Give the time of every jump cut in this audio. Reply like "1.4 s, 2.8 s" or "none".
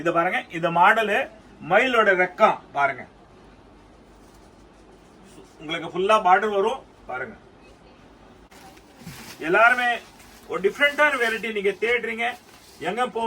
8.5 s